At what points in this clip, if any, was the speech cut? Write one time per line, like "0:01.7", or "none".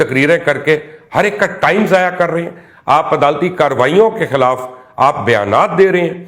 none